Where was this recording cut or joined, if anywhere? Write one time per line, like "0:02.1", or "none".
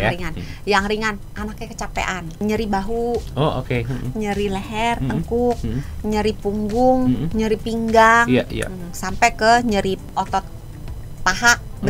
0:02.4
0:10.1

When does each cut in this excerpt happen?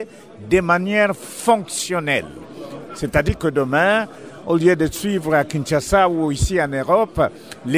0:05.4

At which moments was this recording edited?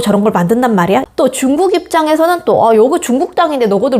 0:01.0

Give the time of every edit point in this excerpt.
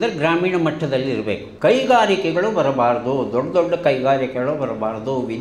0:01.5

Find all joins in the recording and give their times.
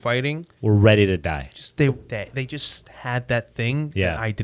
none

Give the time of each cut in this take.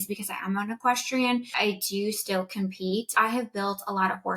0:01.5
0:03.1

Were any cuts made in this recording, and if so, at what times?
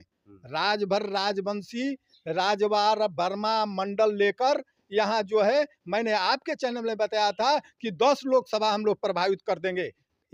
none

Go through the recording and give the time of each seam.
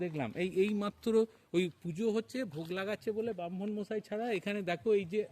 none

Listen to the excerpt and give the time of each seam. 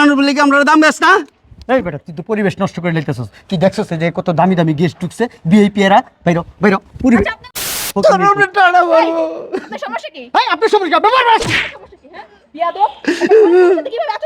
0:07.9

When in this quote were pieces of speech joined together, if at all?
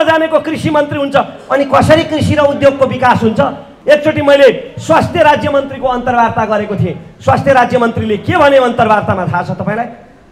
0:03.7

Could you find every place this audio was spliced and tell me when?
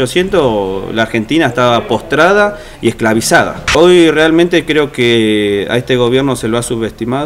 0:03.6

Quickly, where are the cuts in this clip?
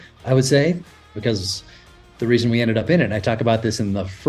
0:01.0

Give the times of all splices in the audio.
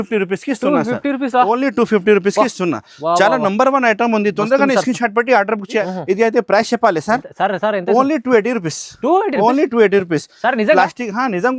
0:05.8

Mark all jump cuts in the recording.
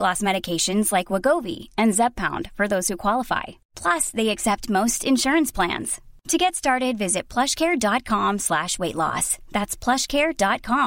none

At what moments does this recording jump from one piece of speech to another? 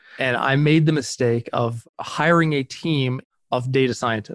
none

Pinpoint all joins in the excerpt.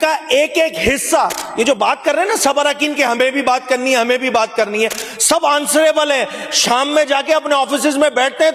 none

